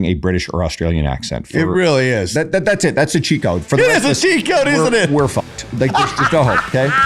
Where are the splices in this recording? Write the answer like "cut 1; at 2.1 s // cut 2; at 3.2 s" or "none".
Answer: none